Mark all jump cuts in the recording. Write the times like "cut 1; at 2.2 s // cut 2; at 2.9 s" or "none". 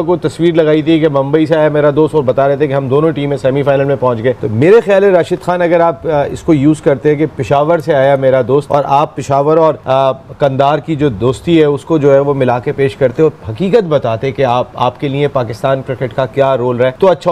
none